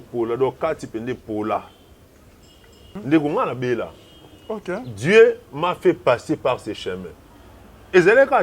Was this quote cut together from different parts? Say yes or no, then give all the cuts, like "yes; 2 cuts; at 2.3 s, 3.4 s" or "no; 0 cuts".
yes; 1 cut; at 2.7 s